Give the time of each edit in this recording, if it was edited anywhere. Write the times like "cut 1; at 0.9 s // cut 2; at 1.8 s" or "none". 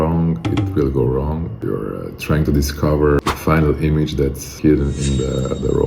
cut 1; at 1.6 s // cut 2; at 3.2 s // cut 3; at 4.5 s